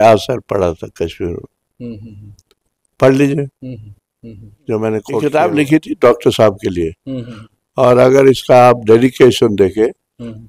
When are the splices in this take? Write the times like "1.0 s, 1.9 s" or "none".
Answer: 5.2 s